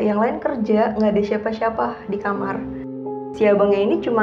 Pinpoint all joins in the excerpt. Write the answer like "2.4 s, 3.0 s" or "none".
3.1 s